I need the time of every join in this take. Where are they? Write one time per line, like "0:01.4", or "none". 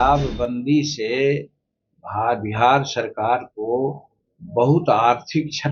none